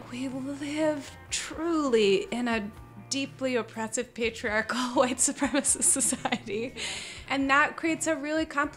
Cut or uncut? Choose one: cut